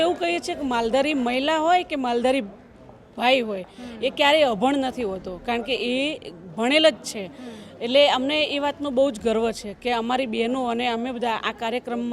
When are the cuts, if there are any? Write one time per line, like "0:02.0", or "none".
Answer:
none